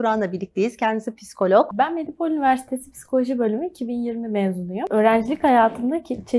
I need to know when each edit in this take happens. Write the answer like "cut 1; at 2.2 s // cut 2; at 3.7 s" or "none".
cut 1; at 1.7 s // cut 2; at 4.9 s